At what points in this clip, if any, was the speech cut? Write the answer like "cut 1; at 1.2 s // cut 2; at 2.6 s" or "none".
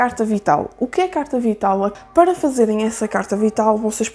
cut 1; at 1.9 s